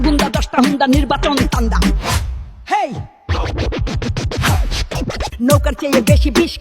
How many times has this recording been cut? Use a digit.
1